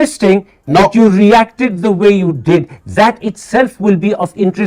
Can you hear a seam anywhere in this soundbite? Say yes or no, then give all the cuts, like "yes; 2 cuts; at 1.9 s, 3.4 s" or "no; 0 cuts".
no; 0 cuts